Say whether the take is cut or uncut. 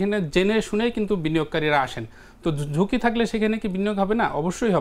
uncut